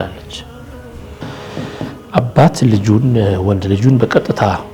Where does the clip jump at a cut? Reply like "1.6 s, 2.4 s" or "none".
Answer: 1.1 s